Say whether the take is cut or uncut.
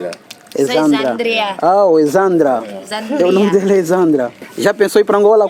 uncut